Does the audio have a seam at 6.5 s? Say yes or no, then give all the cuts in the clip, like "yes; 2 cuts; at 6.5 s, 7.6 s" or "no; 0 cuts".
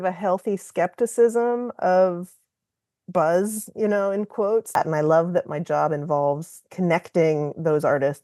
no; 1 cut; at 4.7 s